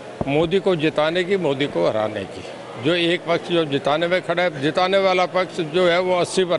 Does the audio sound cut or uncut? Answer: uncut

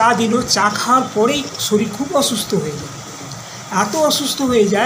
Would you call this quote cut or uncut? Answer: uncut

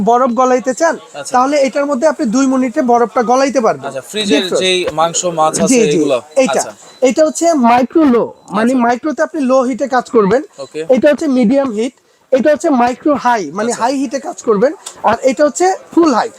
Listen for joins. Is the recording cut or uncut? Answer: uncut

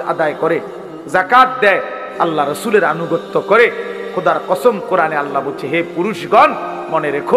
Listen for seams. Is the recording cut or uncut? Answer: uncut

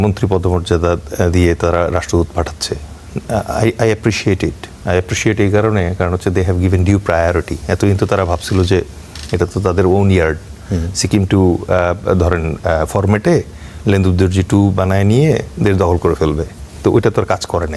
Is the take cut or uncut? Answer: uncut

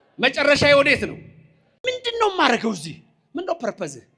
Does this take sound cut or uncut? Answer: cut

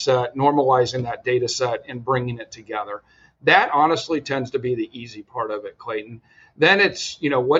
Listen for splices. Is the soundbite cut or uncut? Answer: uncut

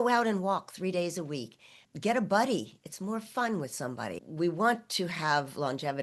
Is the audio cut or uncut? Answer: cut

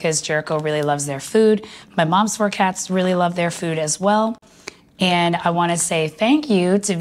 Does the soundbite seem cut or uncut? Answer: uncut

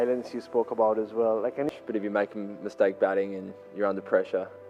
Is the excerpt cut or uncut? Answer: cut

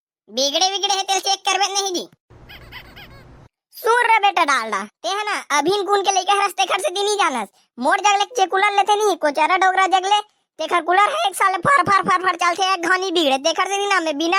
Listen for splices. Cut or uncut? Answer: uncut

